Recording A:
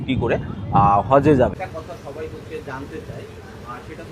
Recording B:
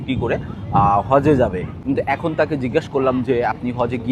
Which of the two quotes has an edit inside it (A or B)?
A